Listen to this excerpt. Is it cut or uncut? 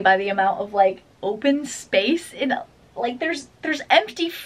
uncut